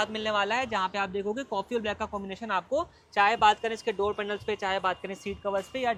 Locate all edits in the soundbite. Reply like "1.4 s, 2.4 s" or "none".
none